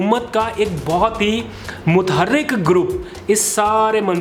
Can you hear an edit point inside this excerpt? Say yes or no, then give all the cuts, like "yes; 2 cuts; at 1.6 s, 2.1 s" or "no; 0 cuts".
no; 0 cuts